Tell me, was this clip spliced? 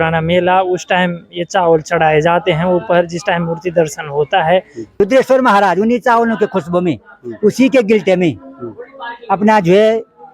yes; 1 cut; at 5.0 s

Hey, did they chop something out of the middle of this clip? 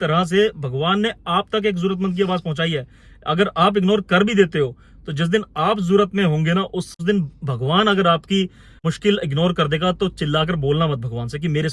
yes; 2 cuts; at 6.9 s, 8.8 s

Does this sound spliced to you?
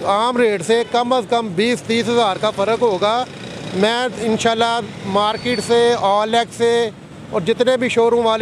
no; 0 cuts

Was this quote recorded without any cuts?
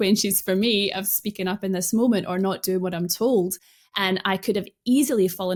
yes; 0 cuts

